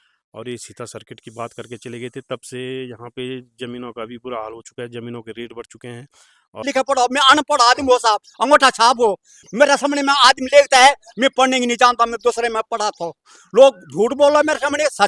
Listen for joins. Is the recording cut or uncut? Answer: cut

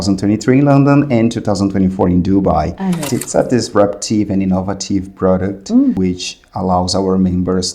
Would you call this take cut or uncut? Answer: cut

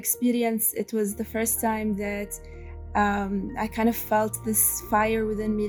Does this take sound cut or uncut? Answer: uncut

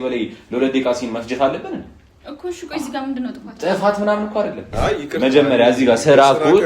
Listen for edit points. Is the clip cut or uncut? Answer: cut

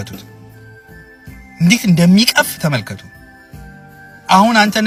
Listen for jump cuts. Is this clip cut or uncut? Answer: uncut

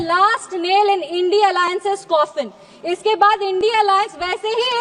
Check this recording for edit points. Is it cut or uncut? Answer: uncut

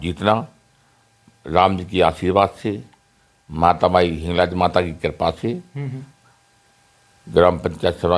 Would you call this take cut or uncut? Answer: uncut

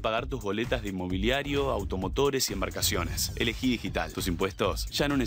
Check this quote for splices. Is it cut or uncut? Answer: cut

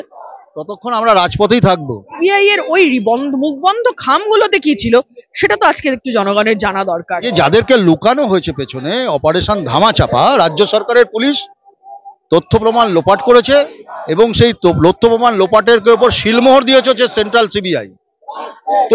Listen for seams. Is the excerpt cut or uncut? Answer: cut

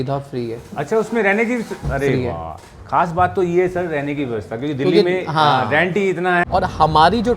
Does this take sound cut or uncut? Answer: cut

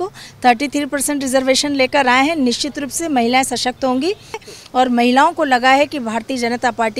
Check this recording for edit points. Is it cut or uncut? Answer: cut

